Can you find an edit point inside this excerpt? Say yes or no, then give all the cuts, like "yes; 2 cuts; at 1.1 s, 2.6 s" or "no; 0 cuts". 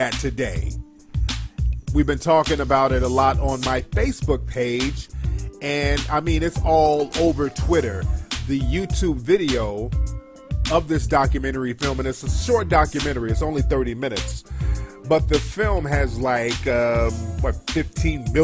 yes; 1 cut; at 7.4 s